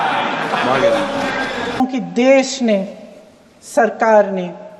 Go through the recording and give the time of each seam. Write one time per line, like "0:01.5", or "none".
0:01.8